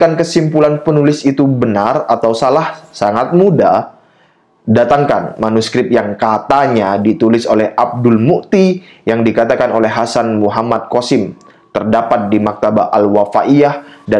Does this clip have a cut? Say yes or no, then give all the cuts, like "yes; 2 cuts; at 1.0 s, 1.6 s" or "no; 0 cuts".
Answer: no; 0 cuts